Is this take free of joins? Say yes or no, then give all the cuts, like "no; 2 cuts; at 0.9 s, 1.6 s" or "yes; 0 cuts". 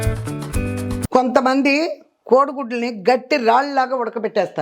no; 1 cut; at 0.9 s